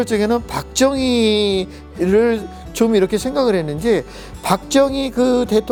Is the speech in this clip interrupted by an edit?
no; 0 cuts

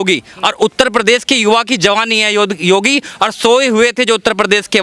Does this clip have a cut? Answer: no; 0 cuts

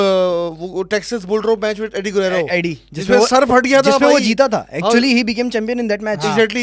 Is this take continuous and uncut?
yes; 0 cuts

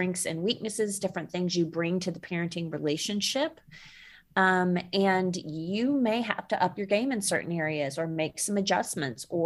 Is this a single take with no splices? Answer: yes; 0 cuts

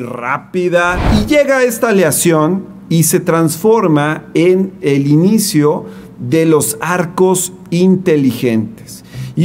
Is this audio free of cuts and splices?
no; 1 cut; at 1.0 s

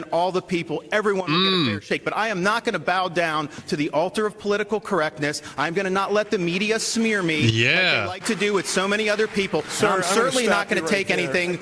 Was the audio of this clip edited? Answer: no; 0 cuts

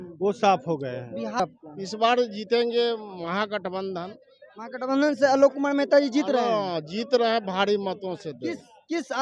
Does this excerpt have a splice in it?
yes; 1 cut; at 1.4 s

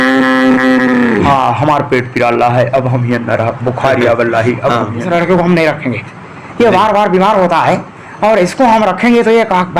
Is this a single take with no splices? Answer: no; 2 cuts; at 1.2 s, 5.0 s

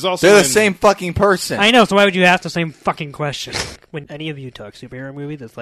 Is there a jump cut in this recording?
yes; 1 cut; at 3.7 s

